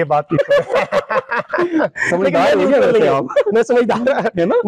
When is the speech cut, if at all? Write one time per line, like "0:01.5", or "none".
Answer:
none